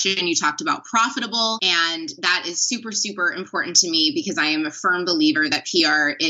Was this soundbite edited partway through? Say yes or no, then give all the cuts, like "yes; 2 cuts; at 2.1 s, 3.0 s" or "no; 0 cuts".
yes; 1 cut; at 1.6 s